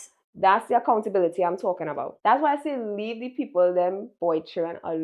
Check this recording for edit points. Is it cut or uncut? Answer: cut